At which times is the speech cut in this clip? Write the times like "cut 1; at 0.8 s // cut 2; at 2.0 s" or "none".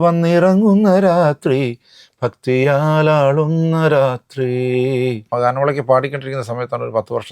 cut 1; at 5.2 s